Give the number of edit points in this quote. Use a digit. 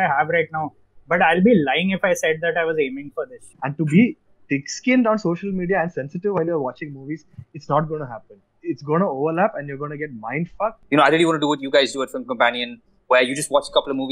2